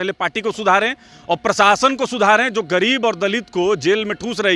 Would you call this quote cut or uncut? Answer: uncut